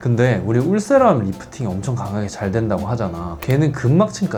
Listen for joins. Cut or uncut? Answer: uncut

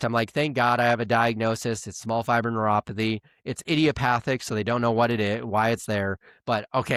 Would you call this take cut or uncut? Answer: uncut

